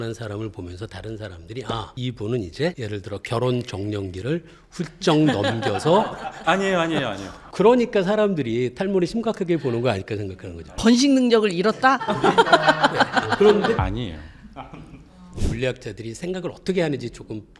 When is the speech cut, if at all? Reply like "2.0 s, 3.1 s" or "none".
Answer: 13.8 s, 15.2 s